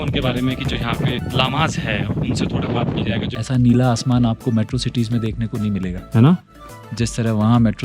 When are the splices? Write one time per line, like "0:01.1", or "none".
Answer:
0:01.2
0:03.4

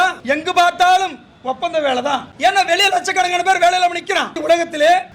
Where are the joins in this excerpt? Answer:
0:02.3
0:04.4

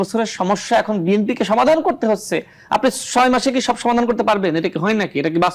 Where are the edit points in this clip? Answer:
none

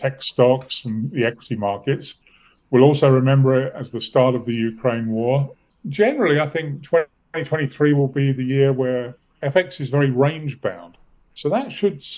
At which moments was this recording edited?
0:05.7

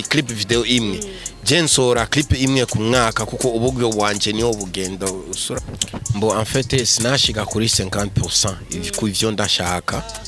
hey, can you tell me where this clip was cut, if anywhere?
0:05.5

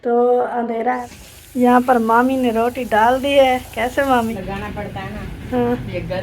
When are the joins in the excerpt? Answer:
0:01.0
0:04.4

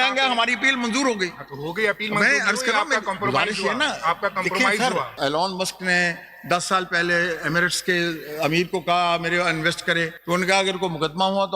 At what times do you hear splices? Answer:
0:05.1
0:10.2

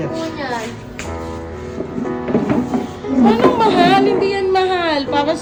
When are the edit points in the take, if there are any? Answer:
none

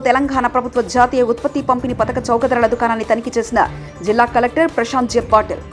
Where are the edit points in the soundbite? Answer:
none

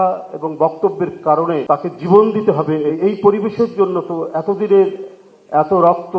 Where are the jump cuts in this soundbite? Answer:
0:01.6
0:02.9

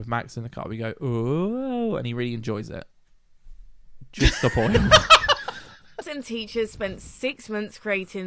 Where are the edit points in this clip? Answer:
0:06.1

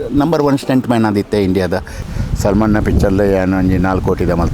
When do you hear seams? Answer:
0:02.0

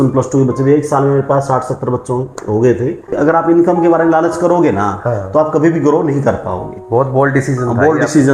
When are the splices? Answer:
0:03.1

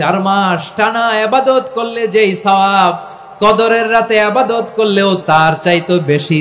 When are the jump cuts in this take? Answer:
0:05.2

